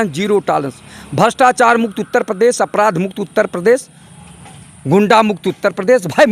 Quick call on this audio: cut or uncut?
uncut